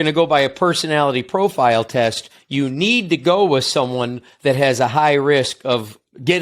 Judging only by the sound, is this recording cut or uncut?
uncut